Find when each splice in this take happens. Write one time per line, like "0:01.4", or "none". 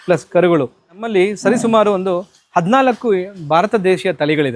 0:01.1